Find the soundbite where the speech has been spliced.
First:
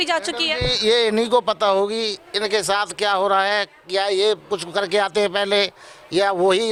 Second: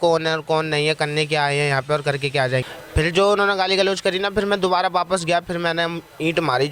second; 1 cut; at 2.6 s

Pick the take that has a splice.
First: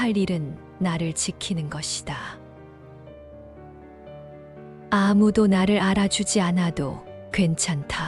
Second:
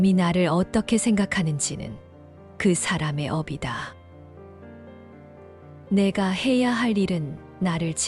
first; 2 cuts; at 2.3 s, 4.4 s

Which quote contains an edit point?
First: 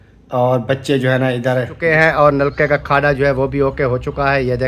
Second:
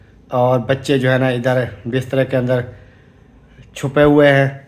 first; 1 cut; at 1.9 s

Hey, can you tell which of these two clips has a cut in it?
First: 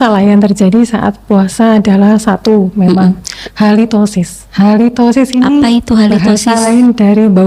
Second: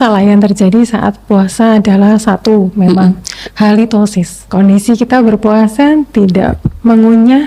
second; 1 cut; at 4.4 s

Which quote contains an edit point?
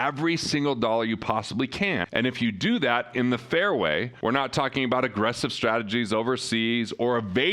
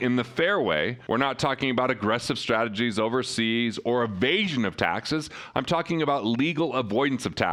first; 1 cut; at 2.1 s

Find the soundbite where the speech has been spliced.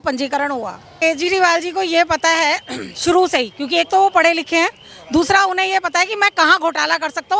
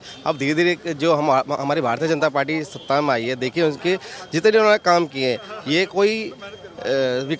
first; 1 cut; at 0.9 s

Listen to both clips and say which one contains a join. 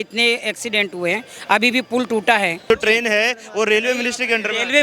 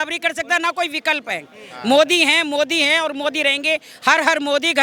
first; 1 cut; at 2.7 s

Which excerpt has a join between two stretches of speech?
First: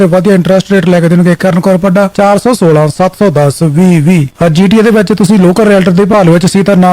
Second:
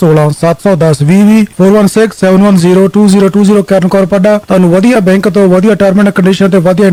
first; 1 cut; at 4.3 s

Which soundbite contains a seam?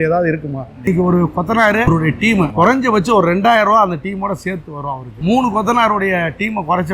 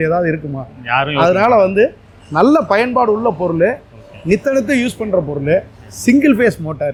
first; 3 cuts; at 0.8 s, 2.4 s, 5.0 s

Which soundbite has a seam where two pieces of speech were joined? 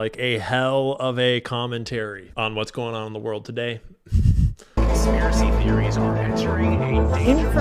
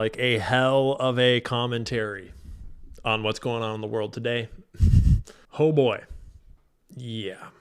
first; 2 cuts; at 2.2 s, 4.6 s

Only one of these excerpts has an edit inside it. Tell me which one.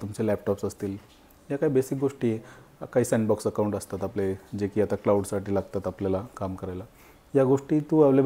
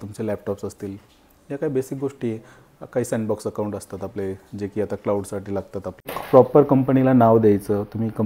second; 1 cut; at 6.1 s

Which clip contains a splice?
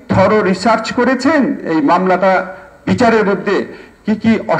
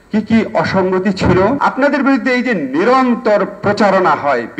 second; 1 cut; at 1.6 s

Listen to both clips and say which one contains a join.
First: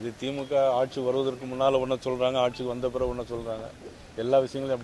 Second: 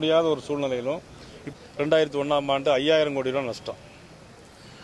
second; 1 cut; at 1.5 s

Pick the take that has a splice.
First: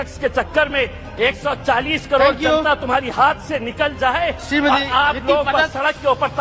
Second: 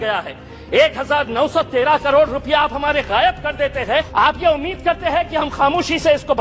second; 1 cut; at 4.1 s

